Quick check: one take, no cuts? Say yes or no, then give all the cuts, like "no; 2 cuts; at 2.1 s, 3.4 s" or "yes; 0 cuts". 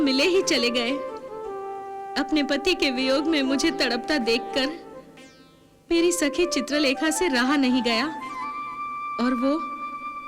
yes; 0 cuts